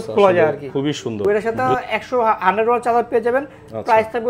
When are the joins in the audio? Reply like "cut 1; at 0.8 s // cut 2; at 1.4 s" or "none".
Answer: cut 1; at 1.2 s